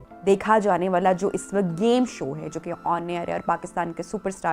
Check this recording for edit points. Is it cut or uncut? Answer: uncut